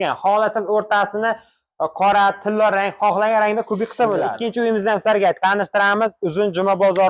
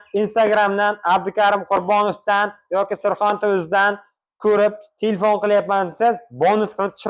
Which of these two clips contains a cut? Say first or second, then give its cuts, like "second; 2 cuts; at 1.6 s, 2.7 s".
first; 1 cut; at 4.4 s